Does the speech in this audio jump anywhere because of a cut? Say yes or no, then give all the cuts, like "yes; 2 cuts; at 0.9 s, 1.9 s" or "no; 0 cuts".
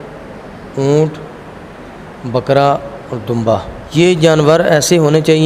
yes; 1 cut; at 3.8 s